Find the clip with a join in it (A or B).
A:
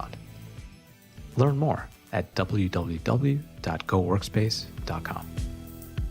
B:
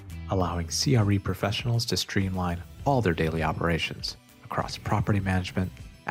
A